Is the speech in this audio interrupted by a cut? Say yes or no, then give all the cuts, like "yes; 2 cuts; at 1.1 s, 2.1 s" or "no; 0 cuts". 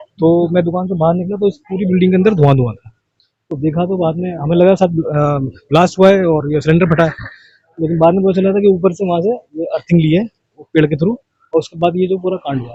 no; 0 cuts